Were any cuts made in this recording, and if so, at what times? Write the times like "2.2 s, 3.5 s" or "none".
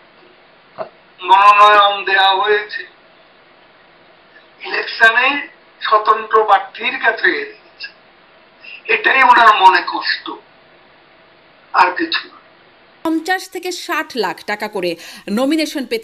13.1 s

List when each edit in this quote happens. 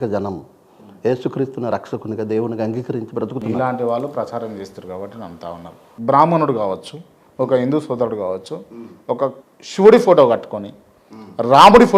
5.8 s

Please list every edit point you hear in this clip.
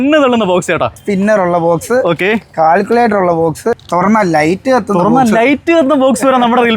0.9 s, 3.8 s

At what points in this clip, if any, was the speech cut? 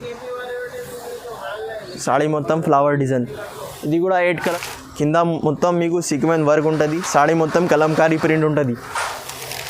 4.5 s

